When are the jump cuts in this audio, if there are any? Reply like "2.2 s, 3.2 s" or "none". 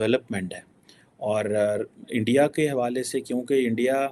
none

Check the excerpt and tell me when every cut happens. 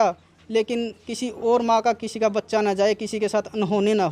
none

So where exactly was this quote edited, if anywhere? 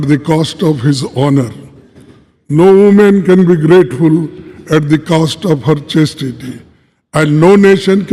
none

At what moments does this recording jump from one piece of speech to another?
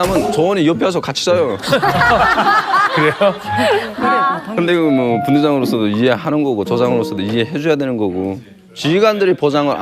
none

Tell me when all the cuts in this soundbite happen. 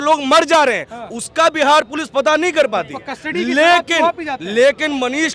none

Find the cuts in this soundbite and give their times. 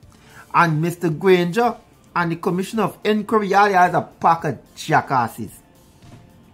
none

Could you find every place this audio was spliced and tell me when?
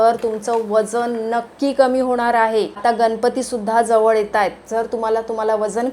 2.8 s

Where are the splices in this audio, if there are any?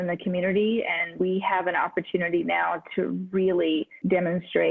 1.1 s

